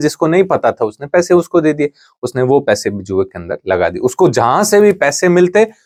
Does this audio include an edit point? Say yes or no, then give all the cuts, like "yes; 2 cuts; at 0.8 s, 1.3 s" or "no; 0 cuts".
no; 0 cuts